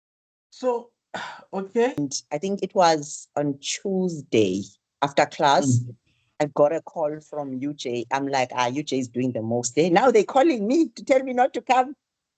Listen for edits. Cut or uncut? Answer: cut